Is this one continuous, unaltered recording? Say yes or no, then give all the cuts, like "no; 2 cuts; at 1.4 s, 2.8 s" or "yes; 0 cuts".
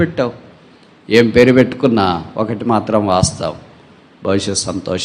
yes; 0 cuts